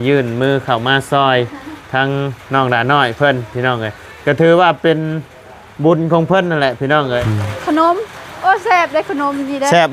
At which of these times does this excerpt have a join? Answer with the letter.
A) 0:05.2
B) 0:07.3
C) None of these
B